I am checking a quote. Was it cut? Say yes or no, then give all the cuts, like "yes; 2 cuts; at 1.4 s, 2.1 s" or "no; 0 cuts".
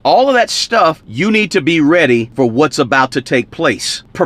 yes; 2 cuts; at 1.1 s, 2.3 s